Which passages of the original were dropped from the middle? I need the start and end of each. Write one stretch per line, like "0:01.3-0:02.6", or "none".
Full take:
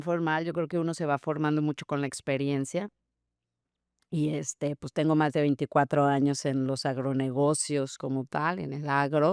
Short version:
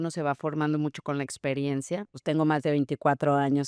0:03.0-0:04.8